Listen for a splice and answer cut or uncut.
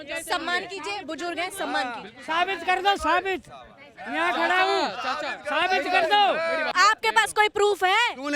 cut